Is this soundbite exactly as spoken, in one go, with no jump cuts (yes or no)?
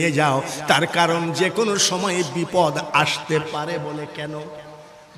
yes